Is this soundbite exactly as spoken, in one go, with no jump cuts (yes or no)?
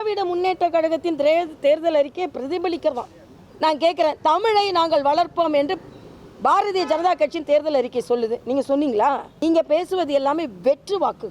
no